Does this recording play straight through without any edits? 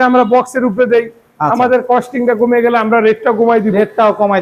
yes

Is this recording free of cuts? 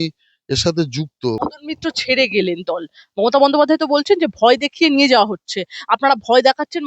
no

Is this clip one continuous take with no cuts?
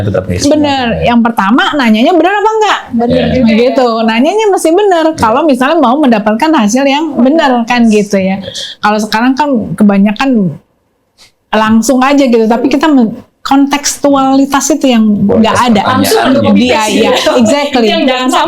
yes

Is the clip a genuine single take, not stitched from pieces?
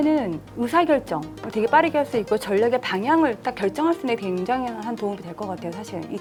yes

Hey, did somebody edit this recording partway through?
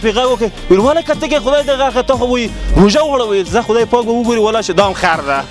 no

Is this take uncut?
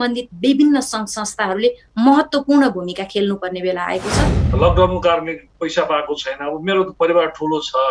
no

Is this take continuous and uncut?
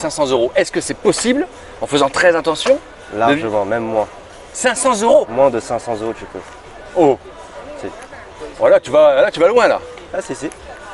yes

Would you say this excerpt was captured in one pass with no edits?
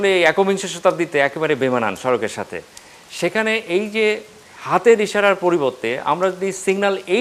yes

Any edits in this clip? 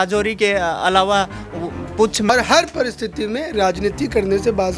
yes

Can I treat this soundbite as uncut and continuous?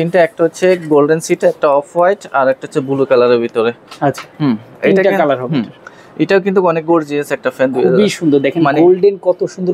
yes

